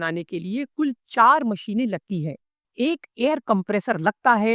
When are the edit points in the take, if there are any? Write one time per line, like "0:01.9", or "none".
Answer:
0:02.6